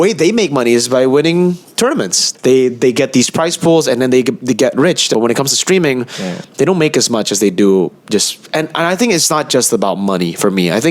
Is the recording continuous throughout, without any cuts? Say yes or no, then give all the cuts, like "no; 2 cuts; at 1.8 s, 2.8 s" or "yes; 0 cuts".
no; 2 cuts; at 2.3 s, 5.1 s